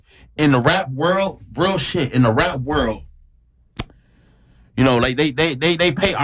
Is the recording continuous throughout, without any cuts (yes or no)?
yes